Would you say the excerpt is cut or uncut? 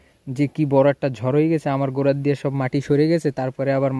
uncut